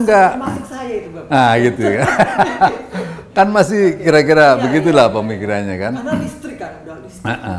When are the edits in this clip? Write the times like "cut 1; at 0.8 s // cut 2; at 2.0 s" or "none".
none